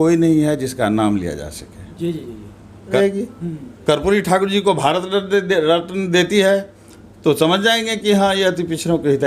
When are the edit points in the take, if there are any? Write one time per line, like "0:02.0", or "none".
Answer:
0:03.0

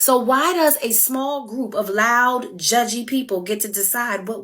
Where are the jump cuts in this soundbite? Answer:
0:03.4

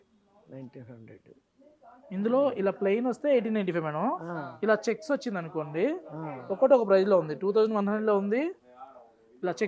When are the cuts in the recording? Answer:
none

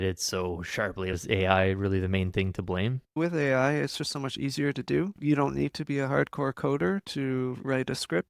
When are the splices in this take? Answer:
0:01.1
0:03.2
0:05.2

